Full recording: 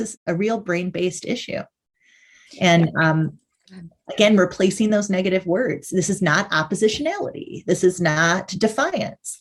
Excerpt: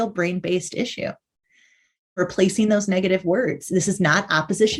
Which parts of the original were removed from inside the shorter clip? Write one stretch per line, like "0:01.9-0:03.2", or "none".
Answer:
0:02.7-0:04.4